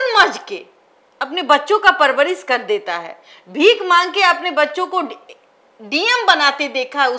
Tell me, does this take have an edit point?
no; 0 cuts

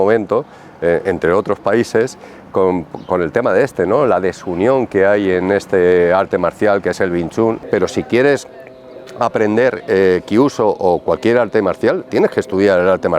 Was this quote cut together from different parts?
yes; 1 cut; at 7.6 s

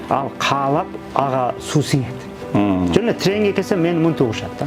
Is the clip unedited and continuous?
yes; 0 cuts

